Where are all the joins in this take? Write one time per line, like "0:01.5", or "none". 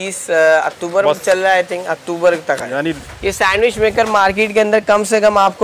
0:03.0